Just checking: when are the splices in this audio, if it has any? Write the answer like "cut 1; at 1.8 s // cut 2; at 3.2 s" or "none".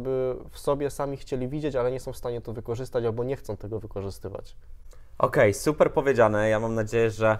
none